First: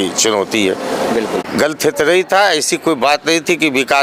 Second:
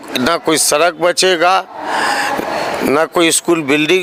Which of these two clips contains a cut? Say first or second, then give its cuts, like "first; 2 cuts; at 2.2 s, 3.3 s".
first; 1 cut; at 1.4 s